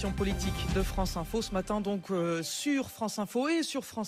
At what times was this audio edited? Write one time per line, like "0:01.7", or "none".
none